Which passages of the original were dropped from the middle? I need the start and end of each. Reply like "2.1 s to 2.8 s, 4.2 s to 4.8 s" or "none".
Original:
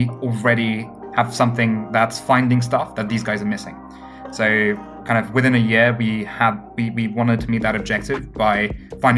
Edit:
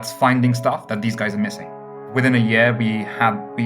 4.2 s to 5.3 s